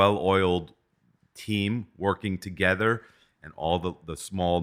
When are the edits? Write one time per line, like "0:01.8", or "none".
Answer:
0:03.1